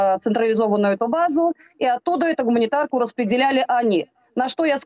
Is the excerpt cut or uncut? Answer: uncut